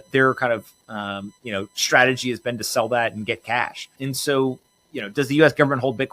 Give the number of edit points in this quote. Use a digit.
1